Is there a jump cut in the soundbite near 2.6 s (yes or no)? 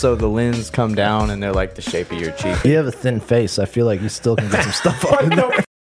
yes